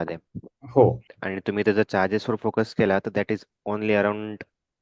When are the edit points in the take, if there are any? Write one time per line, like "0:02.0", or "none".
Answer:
0:01.1